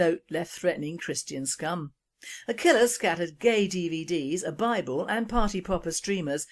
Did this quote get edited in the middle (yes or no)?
yes